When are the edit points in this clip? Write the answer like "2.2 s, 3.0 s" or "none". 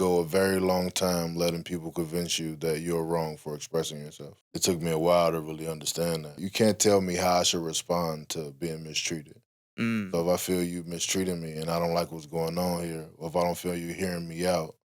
6.4 s